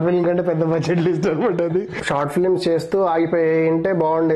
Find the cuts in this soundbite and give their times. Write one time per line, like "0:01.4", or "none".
0:01.9

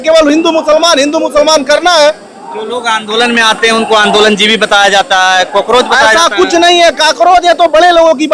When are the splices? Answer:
none

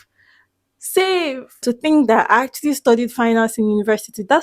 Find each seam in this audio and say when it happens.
0:01.6

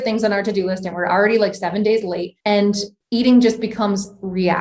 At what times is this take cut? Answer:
0:02.8

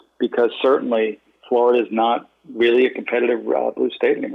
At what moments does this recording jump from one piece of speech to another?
0:01.3
0:02.4

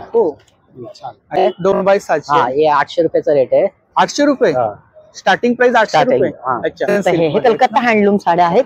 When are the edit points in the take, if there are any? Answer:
0:01.4
0:07.0

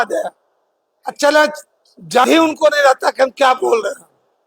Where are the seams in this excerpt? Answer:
0:02.2

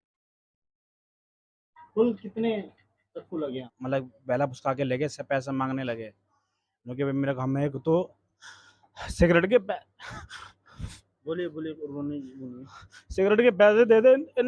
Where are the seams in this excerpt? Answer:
0:03.7

